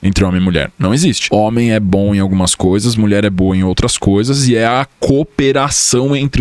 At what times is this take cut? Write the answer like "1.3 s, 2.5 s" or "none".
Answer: none